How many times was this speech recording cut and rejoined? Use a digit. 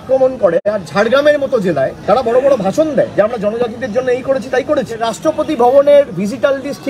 1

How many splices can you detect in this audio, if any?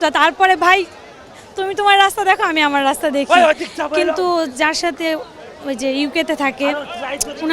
0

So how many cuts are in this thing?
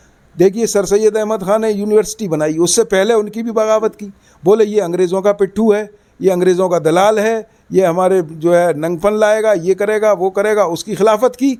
0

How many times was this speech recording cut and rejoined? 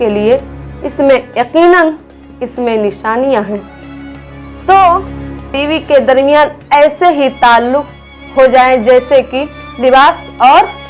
1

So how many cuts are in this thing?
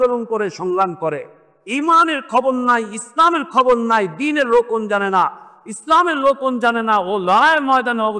0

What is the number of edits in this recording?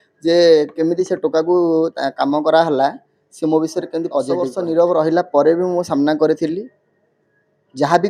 1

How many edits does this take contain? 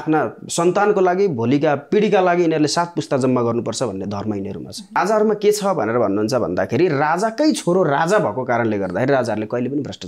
1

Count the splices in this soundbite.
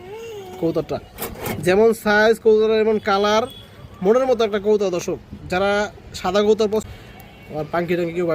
1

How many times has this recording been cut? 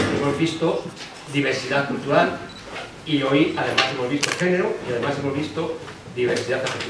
1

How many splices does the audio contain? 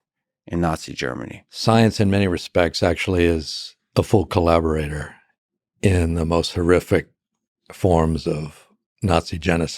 1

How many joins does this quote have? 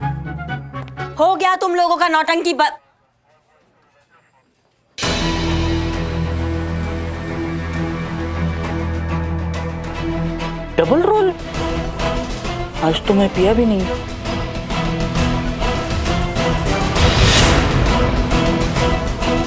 2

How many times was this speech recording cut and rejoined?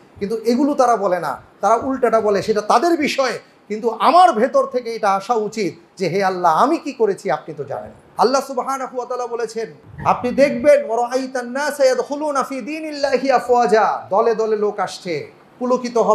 2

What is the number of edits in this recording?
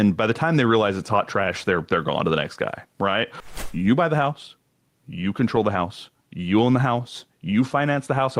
1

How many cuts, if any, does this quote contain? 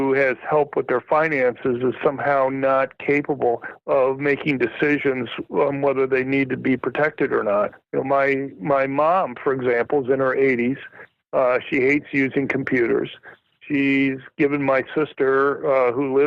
1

